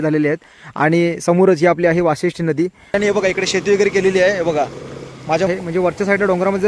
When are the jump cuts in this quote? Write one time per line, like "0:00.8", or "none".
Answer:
0:02.9
0:05.5